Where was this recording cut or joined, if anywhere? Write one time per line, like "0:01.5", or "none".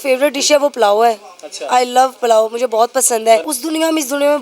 0:03.5

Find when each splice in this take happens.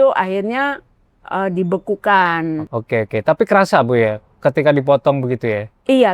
0:02.7

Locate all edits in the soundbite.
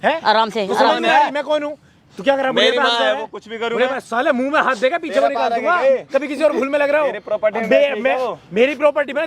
none

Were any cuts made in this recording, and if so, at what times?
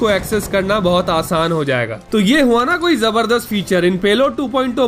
0:02.0

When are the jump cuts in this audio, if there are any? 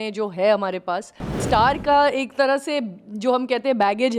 0:01.4

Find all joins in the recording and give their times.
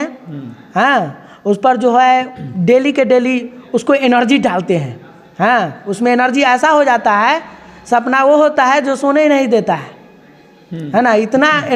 none

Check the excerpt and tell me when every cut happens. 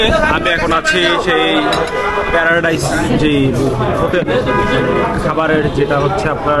none

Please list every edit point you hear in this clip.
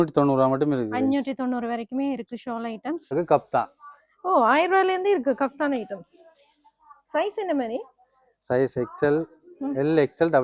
0:03.1

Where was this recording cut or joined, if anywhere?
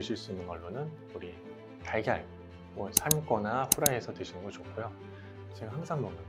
0:05.4

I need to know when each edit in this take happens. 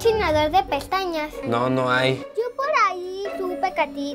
0:01.4

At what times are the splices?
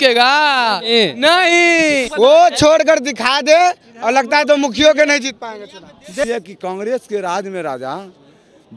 0:02.1
0:06.2

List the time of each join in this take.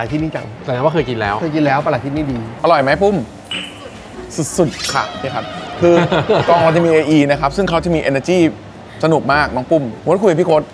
0:02.5

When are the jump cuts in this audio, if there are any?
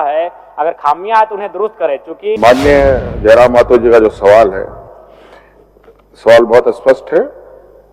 0:02.4

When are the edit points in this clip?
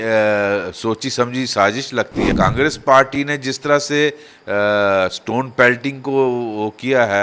0:02.3

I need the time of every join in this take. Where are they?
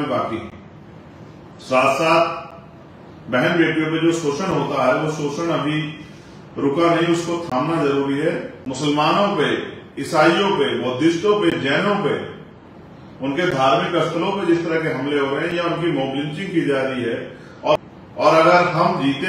0:08.6
0:17.8

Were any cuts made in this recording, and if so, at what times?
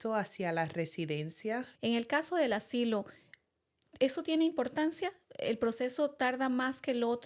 0:01.7

